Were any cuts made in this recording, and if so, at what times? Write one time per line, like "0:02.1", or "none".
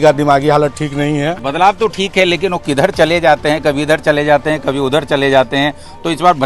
0:01.4